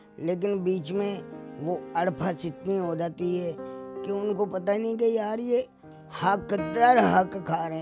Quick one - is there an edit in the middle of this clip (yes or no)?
no